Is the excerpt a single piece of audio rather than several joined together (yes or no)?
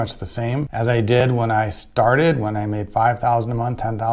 no